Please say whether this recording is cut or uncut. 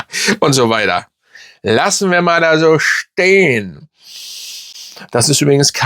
uncut